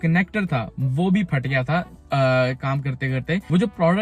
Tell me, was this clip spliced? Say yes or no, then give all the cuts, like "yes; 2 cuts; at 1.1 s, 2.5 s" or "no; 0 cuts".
no; 0 cuts